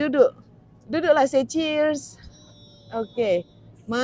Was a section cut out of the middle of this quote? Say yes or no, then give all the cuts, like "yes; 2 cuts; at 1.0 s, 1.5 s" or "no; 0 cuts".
no; 0 cuts